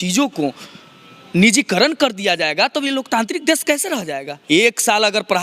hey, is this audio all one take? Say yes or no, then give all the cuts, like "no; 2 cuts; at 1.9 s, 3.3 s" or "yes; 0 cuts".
no; 1 cut; at 4.3 s